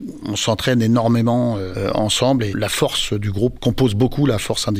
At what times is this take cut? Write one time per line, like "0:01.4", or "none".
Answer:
0:01.7
0:02.5
0:03.6